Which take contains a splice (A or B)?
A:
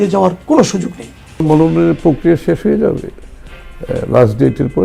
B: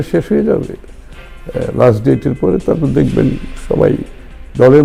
A